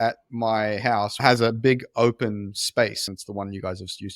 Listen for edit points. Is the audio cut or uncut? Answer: cut